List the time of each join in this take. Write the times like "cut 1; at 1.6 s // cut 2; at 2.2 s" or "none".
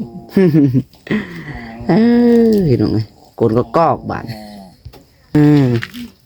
cut 1; at 5.3 s